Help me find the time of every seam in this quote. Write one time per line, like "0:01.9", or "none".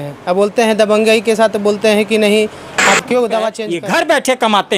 0:03.6